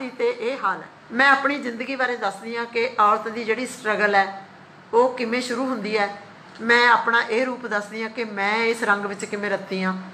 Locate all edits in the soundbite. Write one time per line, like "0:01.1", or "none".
none